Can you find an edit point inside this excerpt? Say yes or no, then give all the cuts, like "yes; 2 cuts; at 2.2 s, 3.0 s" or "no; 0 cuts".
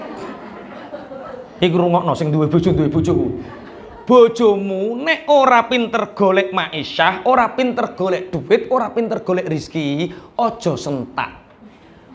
no; 0 cuts